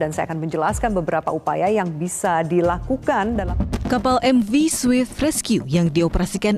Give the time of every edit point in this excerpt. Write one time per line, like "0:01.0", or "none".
0:03.4